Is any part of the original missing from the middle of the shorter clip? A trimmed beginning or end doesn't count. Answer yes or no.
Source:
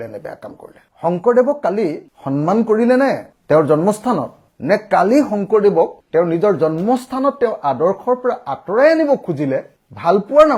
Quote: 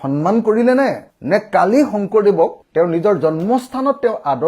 yes